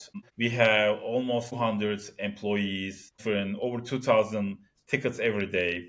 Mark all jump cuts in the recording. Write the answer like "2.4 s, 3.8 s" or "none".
3.2 s